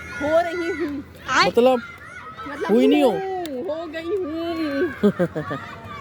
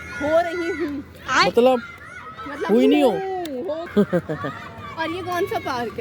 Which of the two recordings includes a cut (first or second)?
second